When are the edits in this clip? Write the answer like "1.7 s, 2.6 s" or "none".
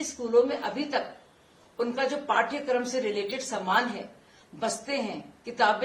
none